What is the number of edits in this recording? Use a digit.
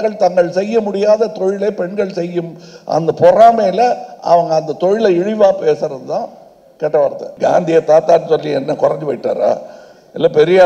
1